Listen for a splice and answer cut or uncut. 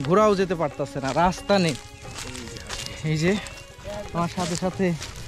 uncut